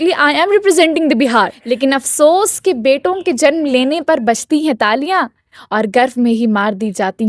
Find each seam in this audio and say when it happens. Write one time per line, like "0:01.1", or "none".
0:01.6